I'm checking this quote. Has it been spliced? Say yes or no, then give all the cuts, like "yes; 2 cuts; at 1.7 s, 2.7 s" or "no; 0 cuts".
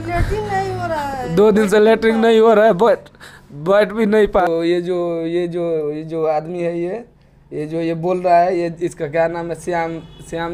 yes; 1 cut; at 4.4 s